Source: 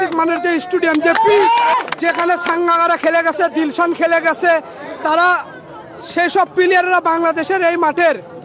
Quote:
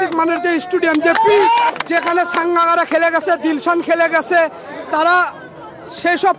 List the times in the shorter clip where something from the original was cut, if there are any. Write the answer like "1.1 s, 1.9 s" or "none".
1.7 s